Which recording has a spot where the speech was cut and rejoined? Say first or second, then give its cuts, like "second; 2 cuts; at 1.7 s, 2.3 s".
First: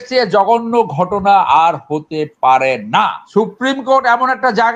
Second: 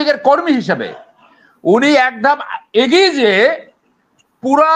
first; 1 cut; at 3.2 s